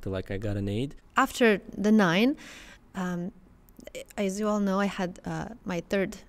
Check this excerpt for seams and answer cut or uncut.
cut